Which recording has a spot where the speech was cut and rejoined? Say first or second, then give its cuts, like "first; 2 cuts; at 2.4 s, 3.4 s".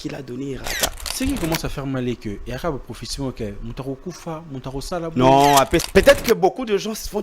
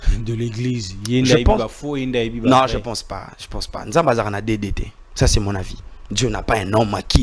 first; 2 cuts; at 1.1 s, 5.9 s